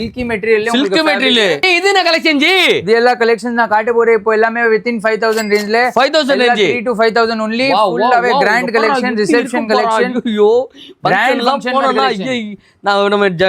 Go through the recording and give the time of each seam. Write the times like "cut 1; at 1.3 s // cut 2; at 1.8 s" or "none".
cut 1; at 1.7 s